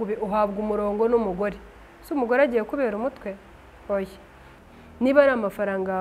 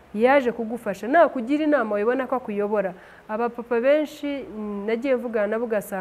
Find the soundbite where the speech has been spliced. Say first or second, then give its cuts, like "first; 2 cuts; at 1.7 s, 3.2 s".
first; 1 cut; at 4.5 s